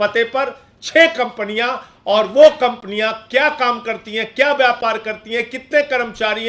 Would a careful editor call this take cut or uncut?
uncut